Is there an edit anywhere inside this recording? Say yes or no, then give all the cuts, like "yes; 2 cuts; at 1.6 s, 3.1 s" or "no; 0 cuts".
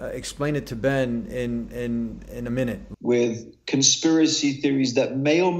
yes; 1 cut; at 2.9 s